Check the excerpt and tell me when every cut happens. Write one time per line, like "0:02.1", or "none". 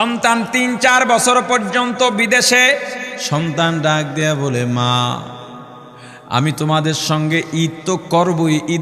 0:03.1